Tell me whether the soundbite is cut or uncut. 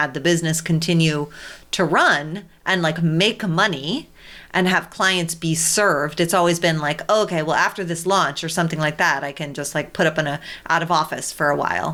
uncut